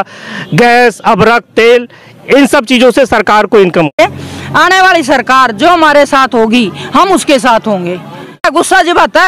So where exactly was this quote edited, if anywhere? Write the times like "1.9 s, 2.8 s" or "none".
3.9 s, 8.4 s